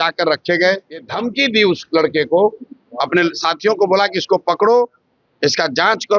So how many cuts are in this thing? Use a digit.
1